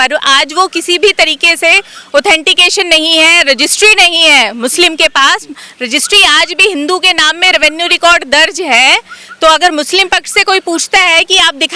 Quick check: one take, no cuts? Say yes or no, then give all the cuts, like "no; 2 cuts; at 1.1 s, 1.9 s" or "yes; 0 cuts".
yes; 0 cuts